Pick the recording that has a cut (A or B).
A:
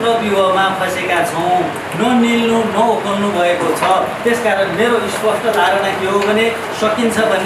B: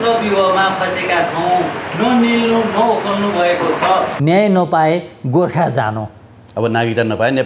B